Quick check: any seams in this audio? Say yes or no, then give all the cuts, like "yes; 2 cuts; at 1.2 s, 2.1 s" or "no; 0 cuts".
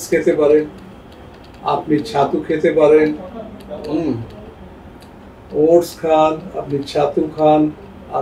no; 0 cuts